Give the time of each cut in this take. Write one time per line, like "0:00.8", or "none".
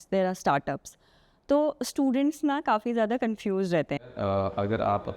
0:04.1